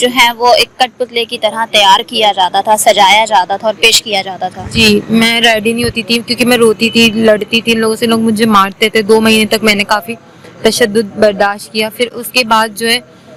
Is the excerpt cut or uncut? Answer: uncut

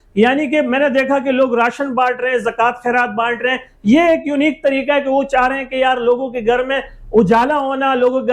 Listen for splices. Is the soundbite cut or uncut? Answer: uncut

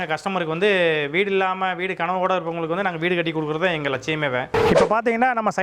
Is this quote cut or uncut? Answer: cut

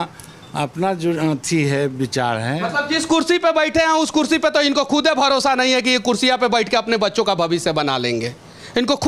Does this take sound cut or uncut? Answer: uncut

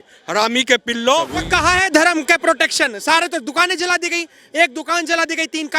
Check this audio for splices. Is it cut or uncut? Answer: cut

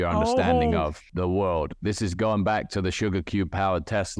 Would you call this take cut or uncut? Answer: cut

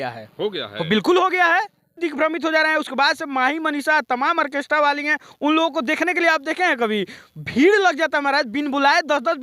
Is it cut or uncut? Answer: cut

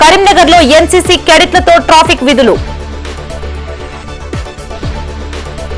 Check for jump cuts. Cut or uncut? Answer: uncut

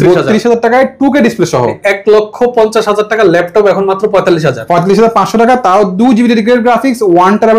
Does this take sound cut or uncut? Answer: cut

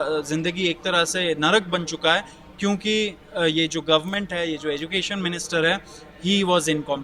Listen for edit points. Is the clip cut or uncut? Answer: uncut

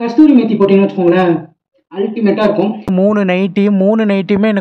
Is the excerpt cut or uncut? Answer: cut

